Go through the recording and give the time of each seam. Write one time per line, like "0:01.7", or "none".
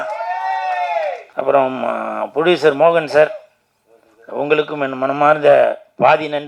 0:01.2